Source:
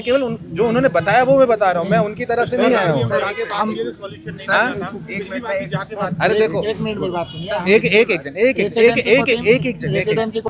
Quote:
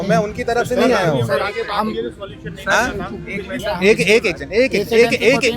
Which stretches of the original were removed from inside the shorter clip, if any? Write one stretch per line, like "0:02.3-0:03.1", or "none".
0:05.3-0:07.4